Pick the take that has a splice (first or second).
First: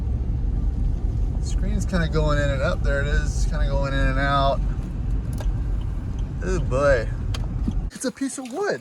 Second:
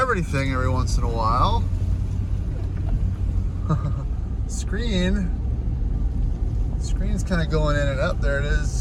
first